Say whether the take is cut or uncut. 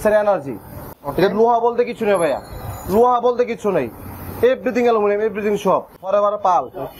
cut